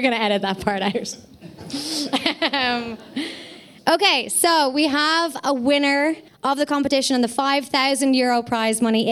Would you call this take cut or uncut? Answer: cut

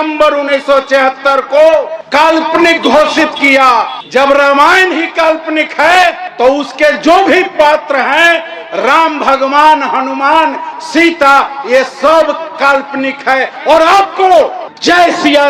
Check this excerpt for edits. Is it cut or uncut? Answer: uncut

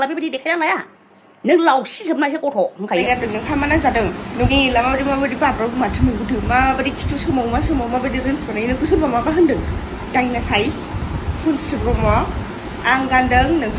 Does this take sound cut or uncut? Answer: cut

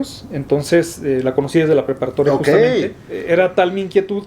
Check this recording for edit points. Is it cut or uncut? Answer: cut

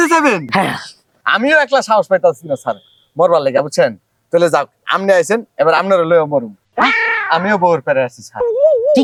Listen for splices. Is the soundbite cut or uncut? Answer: uncut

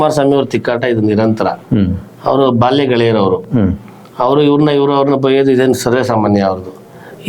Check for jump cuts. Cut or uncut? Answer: uncut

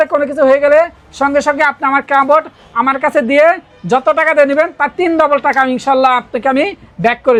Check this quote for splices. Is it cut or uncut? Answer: uncut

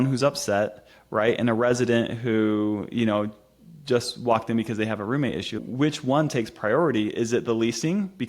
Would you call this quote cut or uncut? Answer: cut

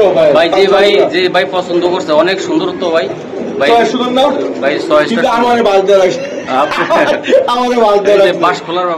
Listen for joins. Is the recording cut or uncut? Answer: uncut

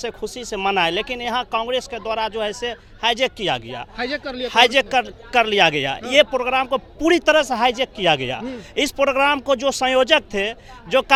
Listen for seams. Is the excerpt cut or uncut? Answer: uncut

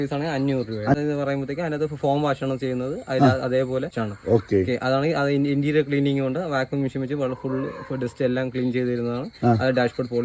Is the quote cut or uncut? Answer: cut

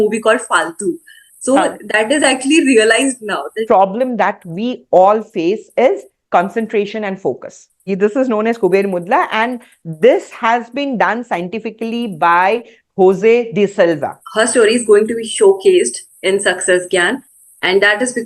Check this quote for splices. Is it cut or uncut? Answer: cut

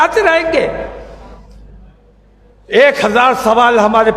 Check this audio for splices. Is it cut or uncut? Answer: uncut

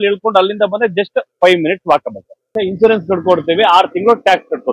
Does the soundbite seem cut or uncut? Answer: cut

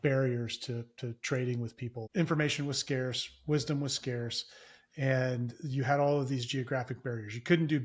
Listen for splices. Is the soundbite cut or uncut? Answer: cut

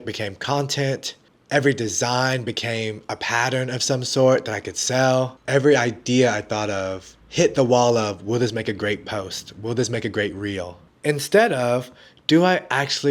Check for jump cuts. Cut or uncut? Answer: uncut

